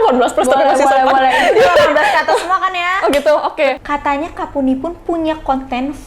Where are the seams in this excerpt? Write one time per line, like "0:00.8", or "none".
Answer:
0:03.8